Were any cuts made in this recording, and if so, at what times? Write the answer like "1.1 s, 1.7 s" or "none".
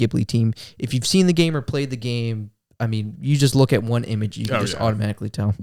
none